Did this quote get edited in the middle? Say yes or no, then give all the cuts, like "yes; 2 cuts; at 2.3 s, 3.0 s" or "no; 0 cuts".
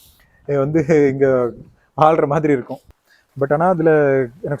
yes; 1 cut; at 3.0 s